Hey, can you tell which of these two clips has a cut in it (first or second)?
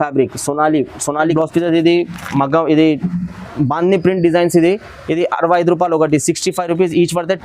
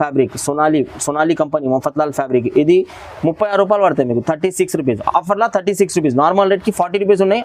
first